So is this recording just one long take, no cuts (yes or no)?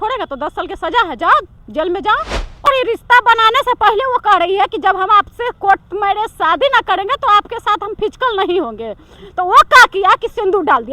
no